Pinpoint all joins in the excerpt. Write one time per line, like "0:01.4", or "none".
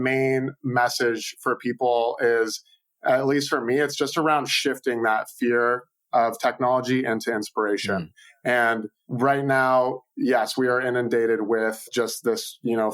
0:09.0